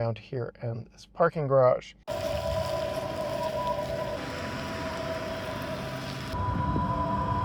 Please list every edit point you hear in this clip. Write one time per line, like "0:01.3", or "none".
0:04.2
0:06.3